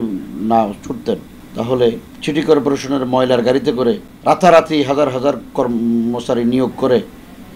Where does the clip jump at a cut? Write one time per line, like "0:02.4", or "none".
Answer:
0:01.4
0:02.1
0:04.1